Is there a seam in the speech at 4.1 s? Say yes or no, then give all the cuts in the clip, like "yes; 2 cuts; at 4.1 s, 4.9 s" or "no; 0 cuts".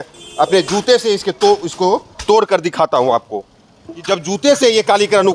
yes; 1 cut; at 4.1 s